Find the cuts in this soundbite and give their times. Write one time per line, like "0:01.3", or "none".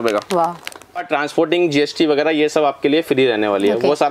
0:01.0